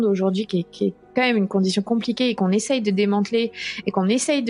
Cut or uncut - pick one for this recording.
uncut